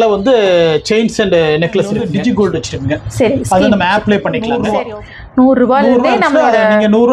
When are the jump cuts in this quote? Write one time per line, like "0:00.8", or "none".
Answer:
0:02.0
0:04.6